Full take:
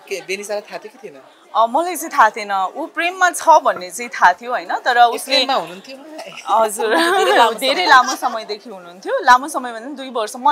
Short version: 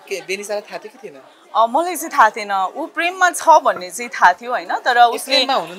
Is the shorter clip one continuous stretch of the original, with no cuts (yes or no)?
yes